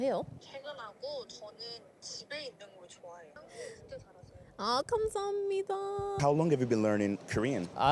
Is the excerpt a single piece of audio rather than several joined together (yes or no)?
no